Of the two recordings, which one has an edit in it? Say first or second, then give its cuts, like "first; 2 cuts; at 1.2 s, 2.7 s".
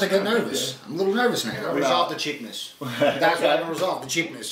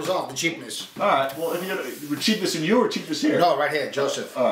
first; 1 cut; at 1.7 s